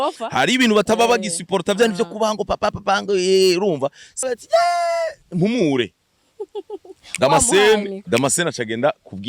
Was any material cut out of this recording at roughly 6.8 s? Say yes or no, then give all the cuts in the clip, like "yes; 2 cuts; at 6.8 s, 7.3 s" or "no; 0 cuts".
no; 1 cut; at 4.3 s